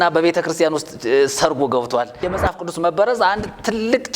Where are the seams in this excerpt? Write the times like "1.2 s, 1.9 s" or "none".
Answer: 2.3 s